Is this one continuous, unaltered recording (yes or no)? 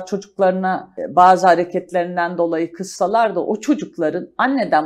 no